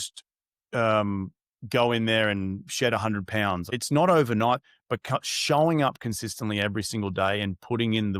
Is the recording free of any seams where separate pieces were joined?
no; 2 cuts; at 3.7 s, 4.7 s

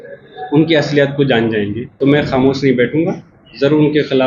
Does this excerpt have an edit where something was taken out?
yes; 1 cut; at 1.8 s

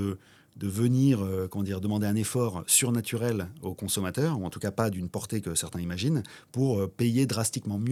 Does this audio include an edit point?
no; 0 cuts

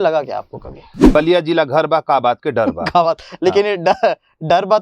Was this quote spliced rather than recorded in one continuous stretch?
yes; 1 cut; at 1.0 s

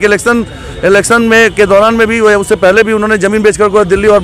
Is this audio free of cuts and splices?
yes; 0 cuts

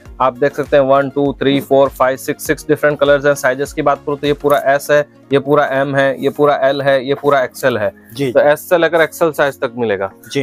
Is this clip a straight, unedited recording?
yes; 0 cuts

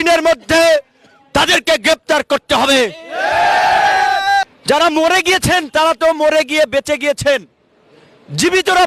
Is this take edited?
yes; 1 cut; at 4.5 s

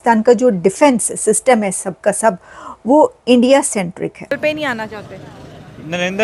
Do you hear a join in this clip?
yes; 1 cut; at 4.4 s

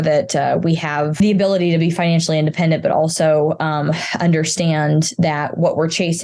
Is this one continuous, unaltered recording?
no; 1 cut; at 1.2 s

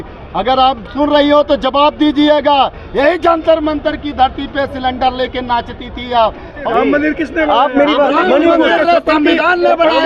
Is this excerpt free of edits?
no; 1 cut; at 6.6 s

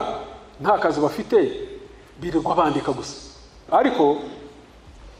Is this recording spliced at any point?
yes; 1 cut; at 3.6 s

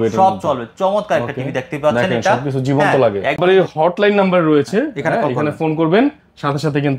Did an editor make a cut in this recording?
yes; 1 cut; at 3.4 s

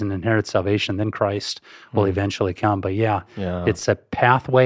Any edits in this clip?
no; 0 cuts

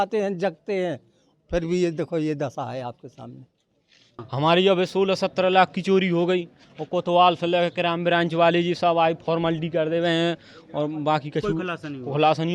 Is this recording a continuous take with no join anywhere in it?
no; 1 cut; at 4.2 s

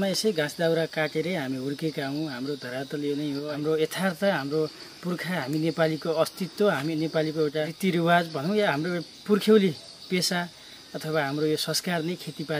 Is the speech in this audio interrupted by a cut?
yes; 2 cuts; at 3.5 s, 7.7 s

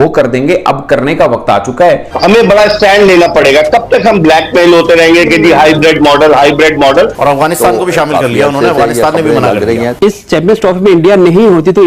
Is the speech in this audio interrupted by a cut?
yes; 3 cuts; at 2.1 s, 7.2 s, 10.0 s

